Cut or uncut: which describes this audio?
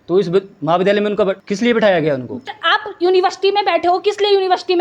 cut